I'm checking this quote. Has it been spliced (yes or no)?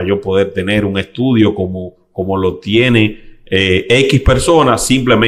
no